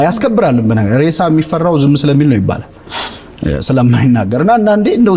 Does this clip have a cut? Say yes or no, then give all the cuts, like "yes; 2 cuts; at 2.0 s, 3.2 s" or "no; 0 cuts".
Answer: no; 0 cuts